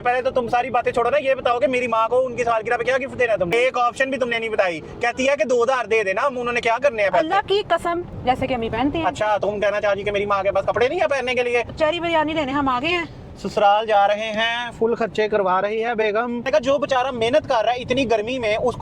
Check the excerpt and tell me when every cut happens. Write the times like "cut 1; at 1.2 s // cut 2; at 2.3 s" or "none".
cut 1; at 3.5 s // cut 2; at 8.1 s // cut 3; at 11.7 s // cut 4; at 16.5 s